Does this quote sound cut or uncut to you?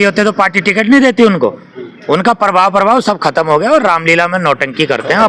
uncut